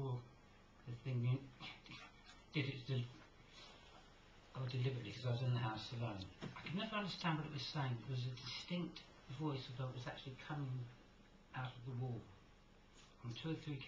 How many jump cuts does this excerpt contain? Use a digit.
1